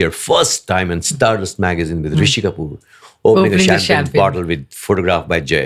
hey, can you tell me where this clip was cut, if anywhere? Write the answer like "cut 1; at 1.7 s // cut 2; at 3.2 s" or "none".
none

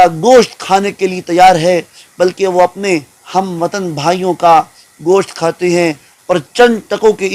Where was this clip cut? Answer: cut 1; at 6.1 s

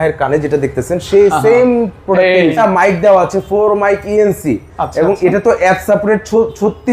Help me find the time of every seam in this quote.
cut 1; at 2.5 s

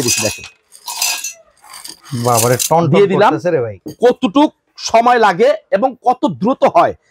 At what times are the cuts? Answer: cut 1; at 1.9 s // cut 2; at 3.8 s

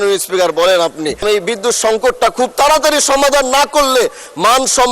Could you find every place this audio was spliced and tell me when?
cut 1; at 1.2 s

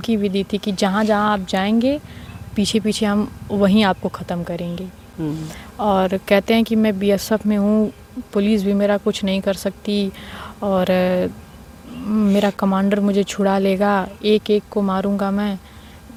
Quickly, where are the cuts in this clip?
none

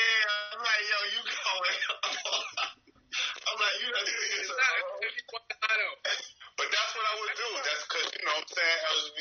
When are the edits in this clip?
none

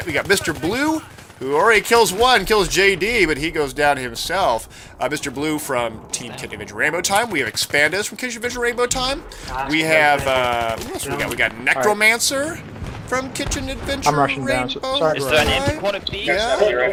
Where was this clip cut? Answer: none

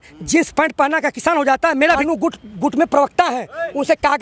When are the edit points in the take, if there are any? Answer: cut 1; at 2.0 s

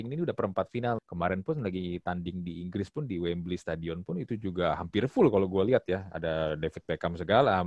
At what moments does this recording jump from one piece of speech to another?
cut 1; at 1.0 s

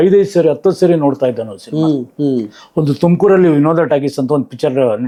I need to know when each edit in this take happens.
none

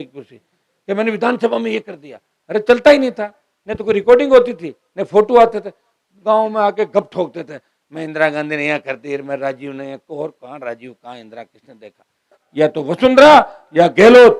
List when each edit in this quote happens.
cut 1; at 12.4 s

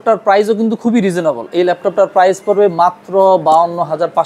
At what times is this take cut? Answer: none

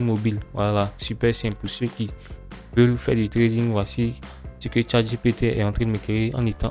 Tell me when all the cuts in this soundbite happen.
none

